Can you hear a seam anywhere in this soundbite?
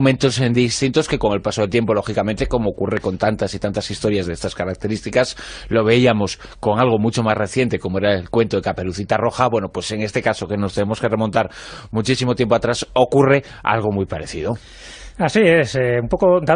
no; 0 cuts

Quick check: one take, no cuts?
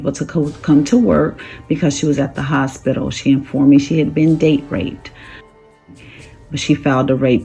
no; 1 cut; at 5.9 s

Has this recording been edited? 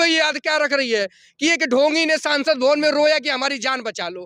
no; 0 cuts

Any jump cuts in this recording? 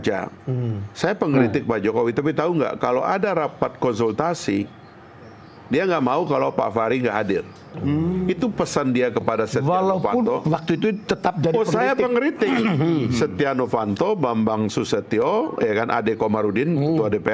no; 0 cuts

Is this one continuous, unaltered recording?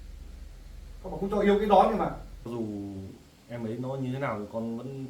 no; 1 cut; at 2.5 s

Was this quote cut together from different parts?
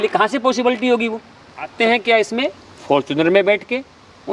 yes; 1 cut; at 1.7 s

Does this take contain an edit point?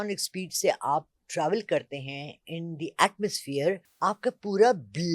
yes; 1 cut; at 3.9 s

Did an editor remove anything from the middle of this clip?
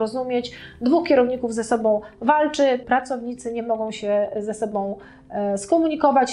yes; 1 cut; at 2.8 s

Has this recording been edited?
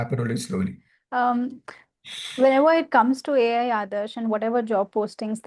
yes; 1 cut; at 0.9 s

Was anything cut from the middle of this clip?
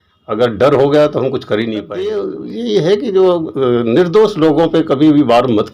yes; 1 cut; at 2.1 s

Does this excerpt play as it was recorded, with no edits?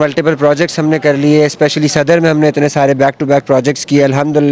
yes; 0 cuts

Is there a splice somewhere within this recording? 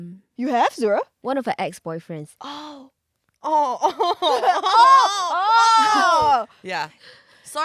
yes; 1 cut; at 1.2 s

